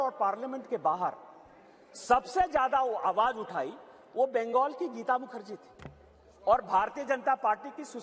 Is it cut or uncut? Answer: uncut